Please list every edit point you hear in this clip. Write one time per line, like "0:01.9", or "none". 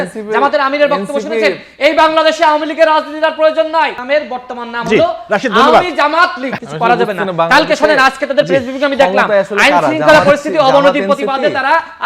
0:04.0
0:06.6